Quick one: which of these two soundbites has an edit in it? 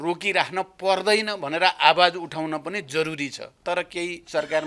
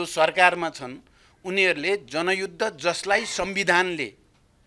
first; 1 cut; at 3.5 s

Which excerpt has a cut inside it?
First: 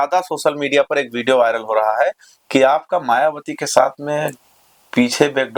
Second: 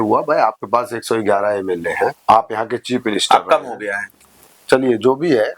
second; 1 cut; at 2.2 s

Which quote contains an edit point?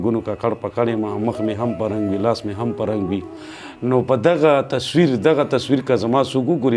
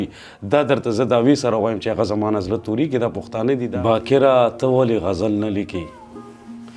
second; 1 cut; at 3.7 s

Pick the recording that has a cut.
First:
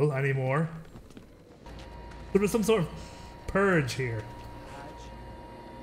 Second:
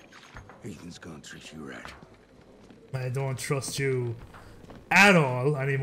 first; 1 cut; at 1.7 s

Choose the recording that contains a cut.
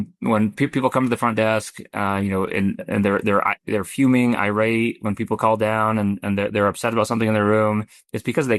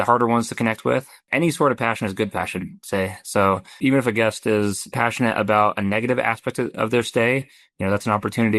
second; 3 cuts; at 1.2 s, 3.7 s, 4.9 s

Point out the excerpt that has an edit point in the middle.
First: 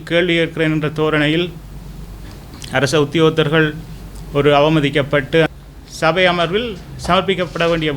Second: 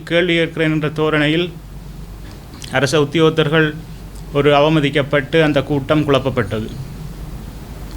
first; 1 cut; at 5.5 s

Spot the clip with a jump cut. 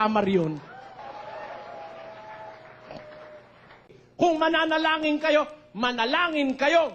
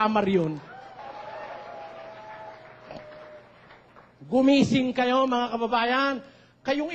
first; 1 cut; at 4.0 s

